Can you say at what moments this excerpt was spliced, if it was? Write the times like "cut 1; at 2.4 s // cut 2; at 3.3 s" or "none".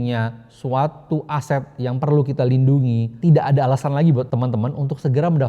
cut 1; at 3.1 s // cut 2; at 4.3 s